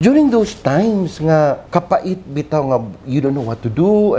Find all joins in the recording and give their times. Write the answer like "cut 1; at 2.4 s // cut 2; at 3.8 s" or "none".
cut 1; at 1.6 s